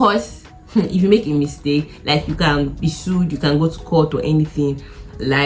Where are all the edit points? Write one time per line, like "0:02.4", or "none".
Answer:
none